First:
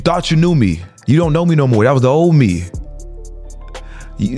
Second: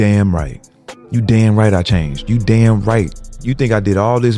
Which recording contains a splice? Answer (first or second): second